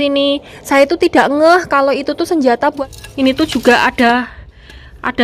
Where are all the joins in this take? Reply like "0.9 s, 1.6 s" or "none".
2.8 s

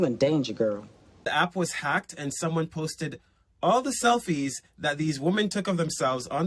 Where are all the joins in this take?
none

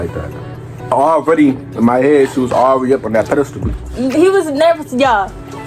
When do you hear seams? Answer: 0.9 s, 3.6 s

